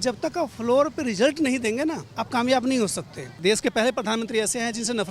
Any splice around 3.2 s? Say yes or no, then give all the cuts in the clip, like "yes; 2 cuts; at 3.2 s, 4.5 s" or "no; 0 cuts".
yes; 2 cuts; at 2.1 s, 3.2 s